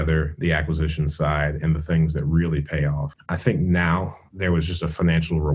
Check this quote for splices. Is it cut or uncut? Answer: cut